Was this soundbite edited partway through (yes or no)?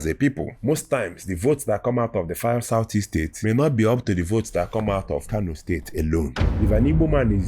yes